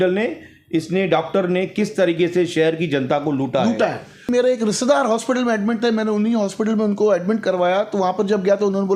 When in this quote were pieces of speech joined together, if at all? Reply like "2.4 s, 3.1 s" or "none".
4.3 s